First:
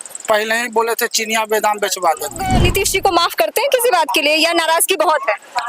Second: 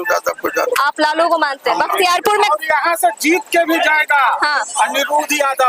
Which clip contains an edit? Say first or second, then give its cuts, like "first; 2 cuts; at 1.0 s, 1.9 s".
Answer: first; 1 cut; at 2.6 s